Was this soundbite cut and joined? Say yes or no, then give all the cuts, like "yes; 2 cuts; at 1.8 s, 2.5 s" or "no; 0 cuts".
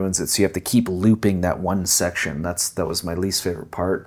no; 0 cuts